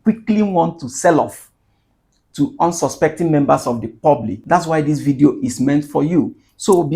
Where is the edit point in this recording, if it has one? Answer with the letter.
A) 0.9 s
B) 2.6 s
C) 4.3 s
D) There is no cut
C